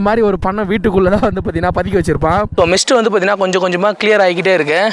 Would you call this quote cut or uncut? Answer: cut